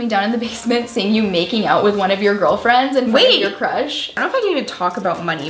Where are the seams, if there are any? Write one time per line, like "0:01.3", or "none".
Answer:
0:04.2